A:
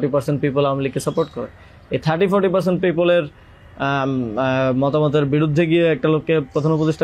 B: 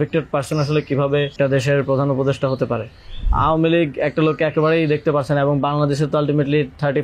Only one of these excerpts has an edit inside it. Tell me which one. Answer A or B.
B